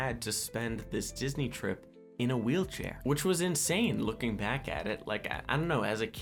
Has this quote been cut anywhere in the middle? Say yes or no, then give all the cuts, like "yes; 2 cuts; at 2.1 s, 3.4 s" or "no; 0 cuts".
no; 0 cuts